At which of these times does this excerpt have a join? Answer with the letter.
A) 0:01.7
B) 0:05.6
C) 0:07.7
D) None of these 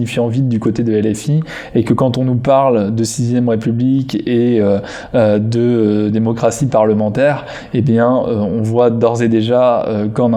D